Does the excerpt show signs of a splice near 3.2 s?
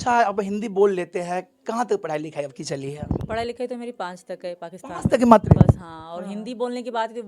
no; 0 cuts

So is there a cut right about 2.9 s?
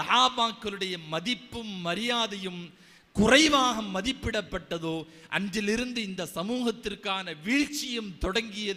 no; 0 cuts

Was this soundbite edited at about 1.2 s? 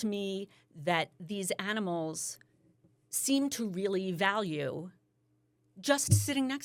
no; 0 cuts

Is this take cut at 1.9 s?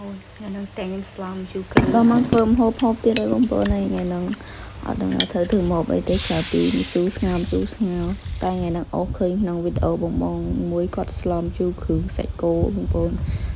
yes; 1 cut; at 1.9 s

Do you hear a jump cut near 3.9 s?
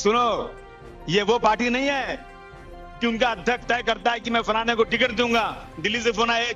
no; 0 cuts

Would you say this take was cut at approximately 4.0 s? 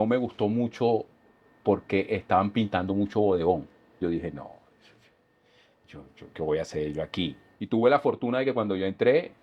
yes; 2 cuts; at 4.0 s, 7.5 s

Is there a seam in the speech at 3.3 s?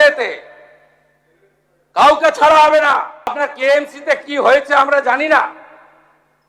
yes; 1 cut; at 3.3 s

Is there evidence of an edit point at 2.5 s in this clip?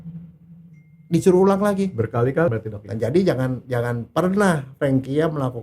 yes; 1 cut; at 2.5 s

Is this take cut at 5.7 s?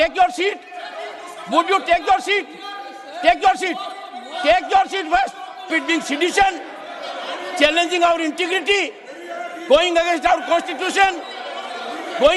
yes; 1 cut; at 5.7 s

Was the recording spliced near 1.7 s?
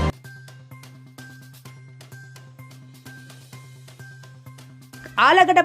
no; 1 cut; at 3.7 s

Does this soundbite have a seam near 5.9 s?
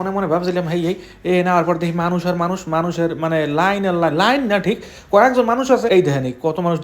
yes; 1 cut; at 5.9 s

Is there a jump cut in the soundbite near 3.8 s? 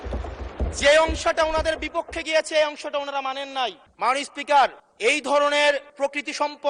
yes; 3 cuts; at 3.8 s, 4.9 s, 5.9 s

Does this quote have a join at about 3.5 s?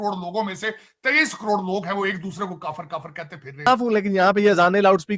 yes; 1 cut; at 3.5 s

